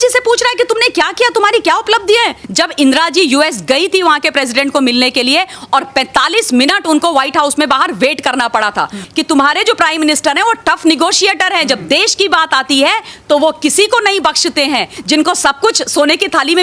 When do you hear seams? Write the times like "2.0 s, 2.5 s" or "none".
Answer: 2.4 s, 9.0 s, 14.9 s